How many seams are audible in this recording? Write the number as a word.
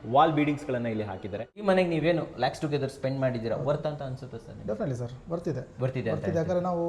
one